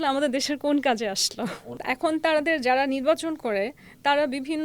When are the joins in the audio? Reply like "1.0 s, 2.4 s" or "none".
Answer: 1.6 s